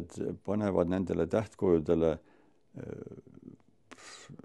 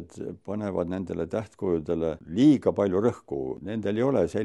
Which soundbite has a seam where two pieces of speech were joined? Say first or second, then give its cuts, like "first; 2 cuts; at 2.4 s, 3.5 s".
second; 2 cuts; at 2.2 s, 3.6 s